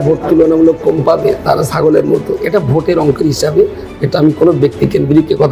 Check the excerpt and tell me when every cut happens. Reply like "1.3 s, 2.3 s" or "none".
2.4 s